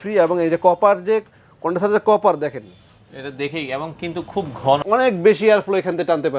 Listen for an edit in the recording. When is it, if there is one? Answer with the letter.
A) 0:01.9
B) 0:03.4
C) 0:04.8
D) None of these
C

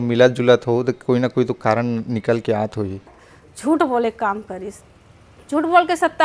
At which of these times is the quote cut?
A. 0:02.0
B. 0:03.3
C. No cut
B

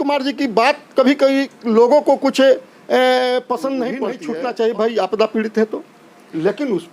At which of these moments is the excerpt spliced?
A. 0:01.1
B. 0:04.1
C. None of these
B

